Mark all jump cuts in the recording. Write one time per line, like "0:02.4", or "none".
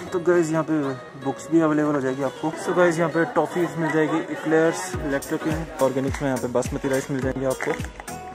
0:02.6
0:05.8